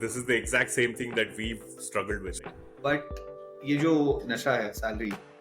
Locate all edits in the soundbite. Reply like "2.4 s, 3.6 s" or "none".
2.3 s